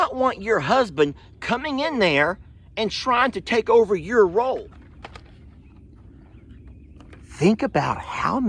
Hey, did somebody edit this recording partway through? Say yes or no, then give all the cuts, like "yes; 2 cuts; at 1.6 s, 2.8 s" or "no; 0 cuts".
yes; 1 cut; at 4.5 s